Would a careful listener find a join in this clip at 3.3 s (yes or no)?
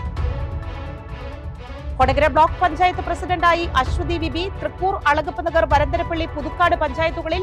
no